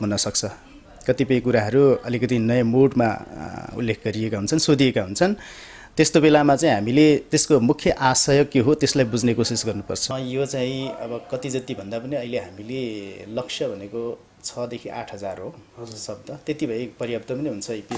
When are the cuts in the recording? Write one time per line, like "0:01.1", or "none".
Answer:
0:10.1